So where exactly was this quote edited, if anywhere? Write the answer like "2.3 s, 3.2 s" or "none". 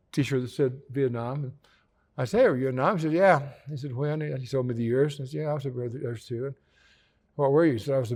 none